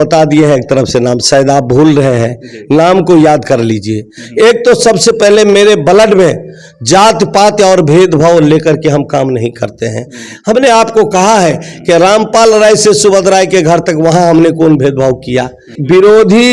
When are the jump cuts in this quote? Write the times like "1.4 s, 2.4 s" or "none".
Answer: 15.6 s